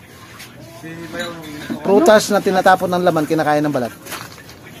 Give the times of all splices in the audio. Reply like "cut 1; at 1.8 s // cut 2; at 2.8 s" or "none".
cut 1; at 2.6 s

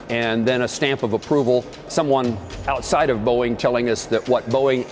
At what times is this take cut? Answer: cut 1; at 1.9 s

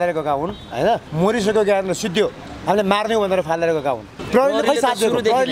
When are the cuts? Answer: cut 1; at 1.1 s // cut 2; at 4.1 s

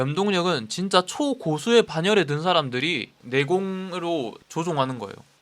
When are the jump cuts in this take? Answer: cut 1; at 4.4 s

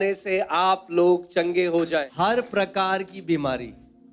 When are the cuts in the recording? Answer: cut 1; at 2.1 s

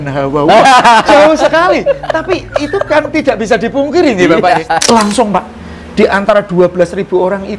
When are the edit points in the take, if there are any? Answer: cut 1; at 4.8 s

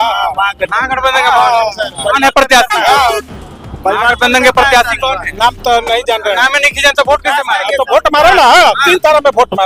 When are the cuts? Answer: none

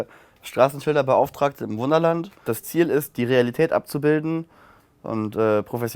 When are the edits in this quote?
cut 1; at 2.4 s

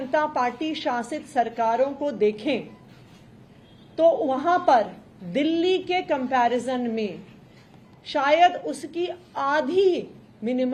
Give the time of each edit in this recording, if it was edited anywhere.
none

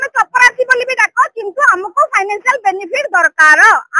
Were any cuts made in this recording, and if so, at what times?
none

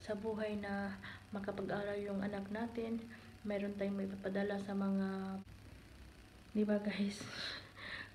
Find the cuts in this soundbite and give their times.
cut 1; at 5.4 s

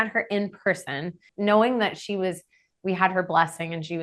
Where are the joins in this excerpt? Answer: cut 1; at 1.3 s

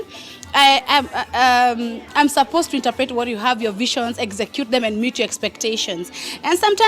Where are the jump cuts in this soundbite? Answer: none

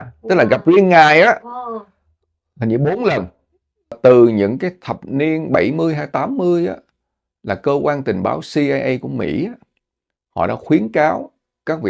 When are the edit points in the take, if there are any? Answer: cut 1; at 4.0 s

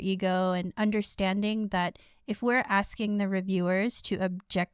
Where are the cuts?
none

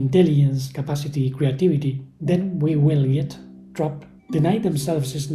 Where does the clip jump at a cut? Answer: cut 1; at 2.1 s // cut 2; at 4.1 s

